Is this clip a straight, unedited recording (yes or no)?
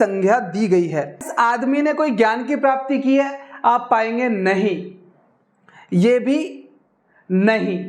no